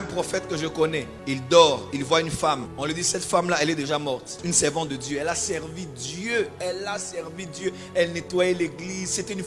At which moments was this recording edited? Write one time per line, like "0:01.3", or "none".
0:02.7
0:04.4